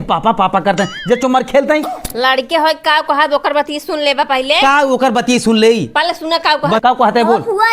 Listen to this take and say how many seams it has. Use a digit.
2